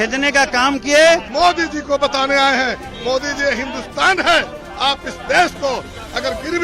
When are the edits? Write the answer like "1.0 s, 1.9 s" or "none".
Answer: 1.3 s